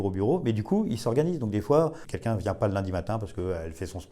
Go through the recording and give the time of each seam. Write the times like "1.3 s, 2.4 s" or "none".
2.0 s